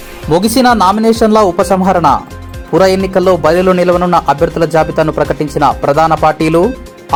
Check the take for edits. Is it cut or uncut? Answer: uncut